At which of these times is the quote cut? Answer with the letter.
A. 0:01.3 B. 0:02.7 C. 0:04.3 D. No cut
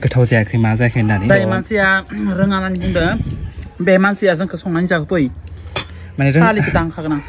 A